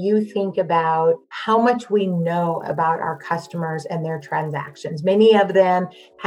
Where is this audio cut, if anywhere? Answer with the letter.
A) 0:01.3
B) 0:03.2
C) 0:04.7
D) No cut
A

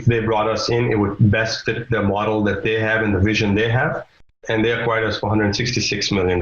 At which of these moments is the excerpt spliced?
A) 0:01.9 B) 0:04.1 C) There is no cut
B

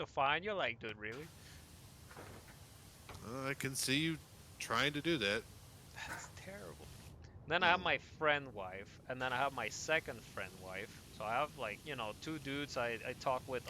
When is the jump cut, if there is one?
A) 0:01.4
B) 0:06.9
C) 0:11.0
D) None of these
B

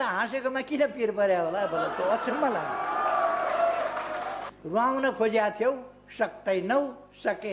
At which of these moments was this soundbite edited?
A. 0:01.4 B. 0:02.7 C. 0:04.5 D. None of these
C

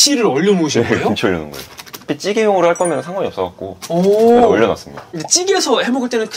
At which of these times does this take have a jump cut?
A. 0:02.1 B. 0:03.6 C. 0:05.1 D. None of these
A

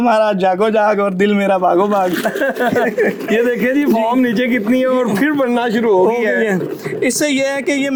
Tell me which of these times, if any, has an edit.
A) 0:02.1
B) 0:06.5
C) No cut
C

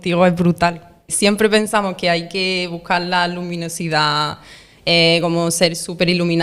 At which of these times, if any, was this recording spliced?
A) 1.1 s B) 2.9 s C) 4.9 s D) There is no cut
A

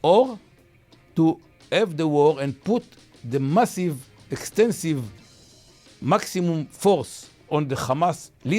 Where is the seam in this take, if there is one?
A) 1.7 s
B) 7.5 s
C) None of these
B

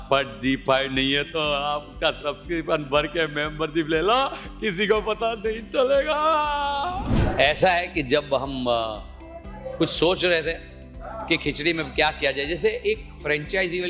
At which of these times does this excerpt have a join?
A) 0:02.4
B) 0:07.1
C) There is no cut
B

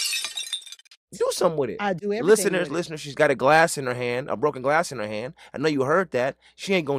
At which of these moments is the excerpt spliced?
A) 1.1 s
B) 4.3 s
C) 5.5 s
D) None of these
A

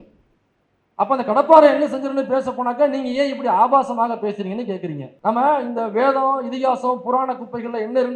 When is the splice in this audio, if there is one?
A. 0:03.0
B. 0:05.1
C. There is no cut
B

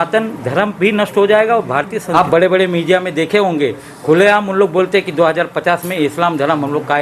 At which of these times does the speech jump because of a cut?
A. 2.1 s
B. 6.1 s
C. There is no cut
A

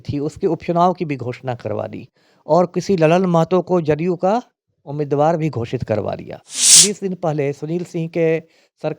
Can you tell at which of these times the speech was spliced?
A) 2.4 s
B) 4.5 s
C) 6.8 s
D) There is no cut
C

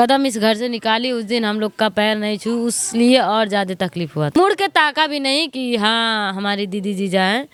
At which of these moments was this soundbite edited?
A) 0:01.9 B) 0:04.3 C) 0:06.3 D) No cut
D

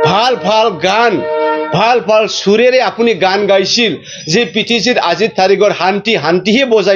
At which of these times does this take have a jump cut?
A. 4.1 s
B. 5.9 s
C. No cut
C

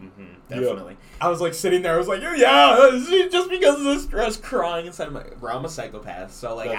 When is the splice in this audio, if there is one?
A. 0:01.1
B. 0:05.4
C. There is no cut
A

